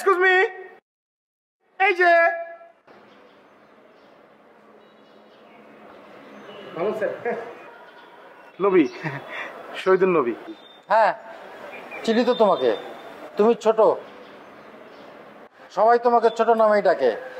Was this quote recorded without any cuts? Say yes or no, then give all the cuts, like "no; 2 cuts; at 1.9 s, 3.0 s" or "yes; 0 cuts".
yes; 0 cuts